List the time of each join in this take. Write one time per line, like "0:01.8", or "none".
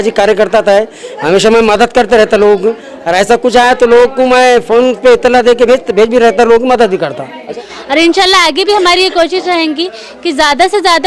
0:07.5